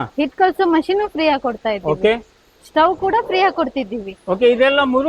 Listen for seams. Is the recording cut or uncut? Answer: uncut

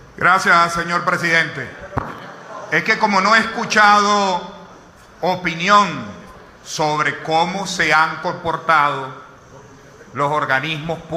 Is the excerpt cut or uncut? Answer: cut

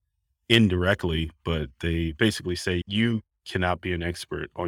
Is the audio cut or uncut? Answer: cut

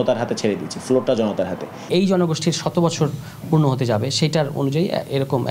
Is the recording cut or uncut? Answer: cut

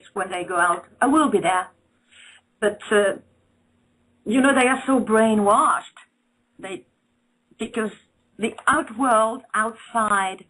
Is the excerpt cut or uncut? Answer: cut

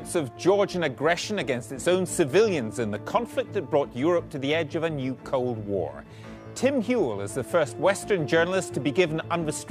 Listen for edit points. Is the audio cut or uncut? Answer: uncut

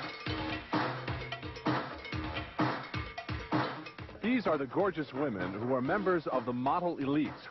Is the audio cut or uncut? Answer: cut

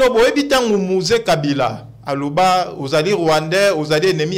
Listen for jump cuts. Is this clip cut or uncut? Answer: uncut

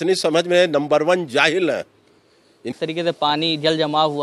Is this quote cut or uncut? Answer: cut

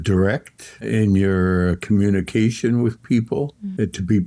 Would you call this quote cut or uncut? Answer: uncut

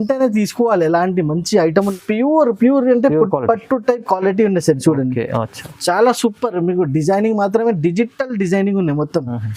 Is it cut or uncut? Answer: cut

